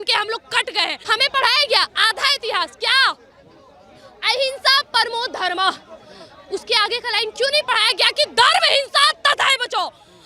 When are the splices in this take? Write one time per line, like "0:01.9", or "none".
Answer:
0:01.0